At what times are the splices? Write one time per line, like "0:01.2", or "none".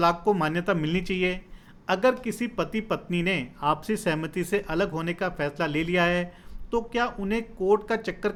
none

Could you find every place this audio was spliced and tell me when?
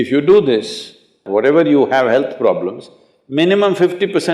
0:01.2

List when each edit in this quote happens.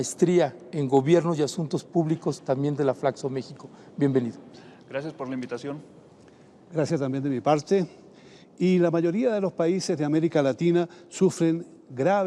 none

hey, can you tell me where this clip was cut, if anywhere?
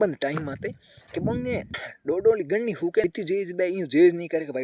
0:01.8
0:03.1

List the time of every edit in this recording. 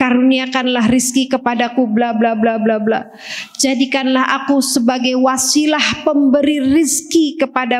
none

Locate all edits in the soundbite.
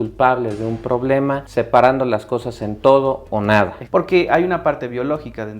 0:03.8

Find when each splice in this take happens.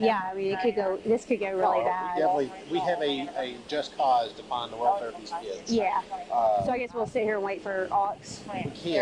none

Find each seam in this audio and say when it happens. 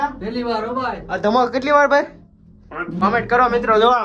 0:03.0

